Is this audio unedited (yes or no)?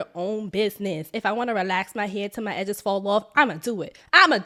yes